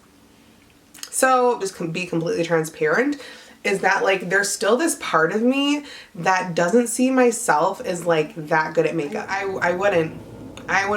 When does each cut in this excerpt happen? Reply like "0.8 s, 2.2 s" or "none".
1.6 s, 9.3 s